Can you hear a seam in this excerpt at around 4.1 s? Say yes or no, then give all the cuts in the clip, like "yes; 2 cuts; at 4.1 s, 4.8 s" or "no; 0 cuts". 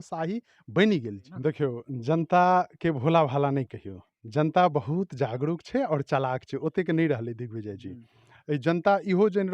no; 1 cut; at 1.2 s